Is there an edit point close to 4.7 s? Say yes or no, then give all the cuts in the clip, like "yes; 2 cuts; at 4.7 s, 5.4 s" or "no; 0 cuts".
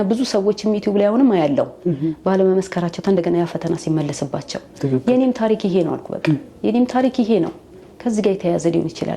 no; 0 cuts